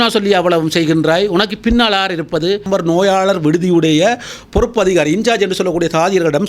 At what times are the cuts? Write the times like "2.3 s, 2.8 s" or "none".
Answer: 2.6 s

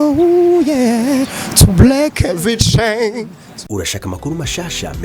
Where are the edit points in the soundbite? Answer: 3.5 s

